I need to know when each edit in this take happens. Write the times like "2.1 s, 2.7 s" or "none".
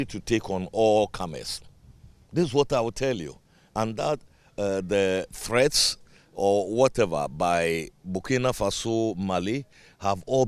none

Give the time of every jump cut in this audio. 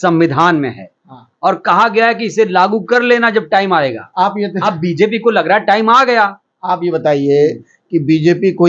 none

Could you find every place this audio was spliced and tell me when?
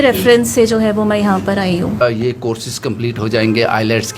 2.0 s

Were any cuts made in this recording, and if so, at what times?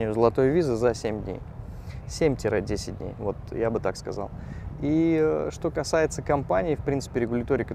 none

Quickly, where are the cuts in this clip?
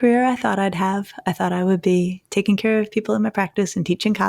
none

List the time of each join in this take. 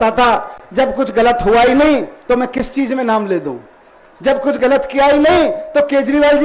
none

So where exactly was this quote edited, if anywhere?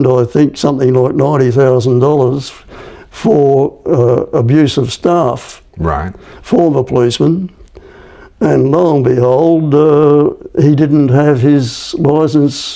none

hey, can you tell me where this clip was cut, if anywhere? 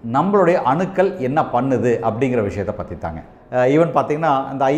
3.3 s

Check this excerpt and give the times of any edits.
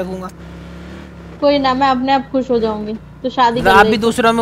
none

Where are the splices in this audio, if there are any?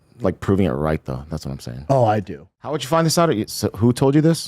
2.5 s

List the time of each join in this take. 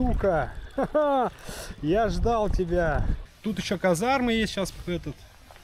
3.3 s

